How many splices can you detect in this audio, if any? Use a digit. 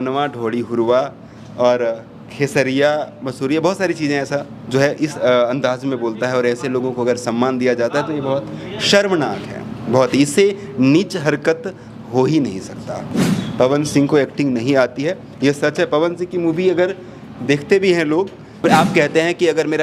2